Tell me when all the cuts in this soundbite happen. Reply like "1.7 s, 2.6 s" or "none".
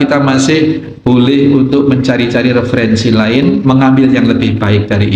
3.6 s